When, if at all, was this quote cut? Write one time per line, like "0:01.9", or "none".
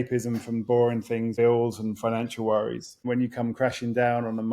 0:01.3
0:03.0